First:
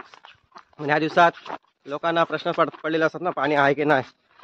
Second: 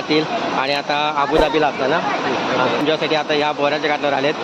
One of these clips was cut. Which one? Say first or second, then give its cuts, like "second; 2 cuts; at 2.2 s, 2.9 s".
second; 1 cut; at 2.8 s